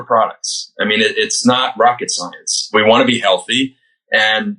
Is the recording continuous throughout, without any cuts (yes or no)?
no